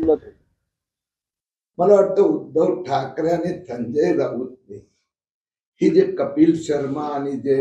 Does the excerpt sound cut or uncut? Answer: cut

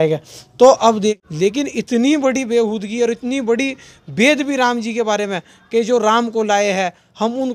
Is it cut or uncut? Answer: cut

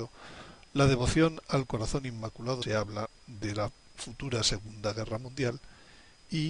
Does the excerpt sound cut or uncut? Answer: uncut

